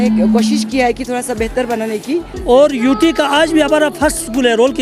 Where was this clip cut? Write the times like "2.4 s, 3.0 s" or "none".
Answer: 2.3 s